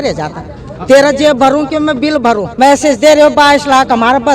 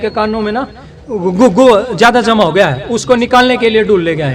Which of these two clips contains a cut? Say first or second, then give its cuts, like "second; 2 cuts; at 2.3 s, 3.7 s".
first; 1 cut; at 2.5 s